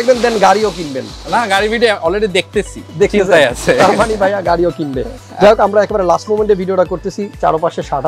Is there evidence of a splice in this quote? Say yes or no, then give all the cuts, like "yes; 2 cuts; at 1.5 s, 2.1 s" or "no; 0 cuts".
no; 0 cuts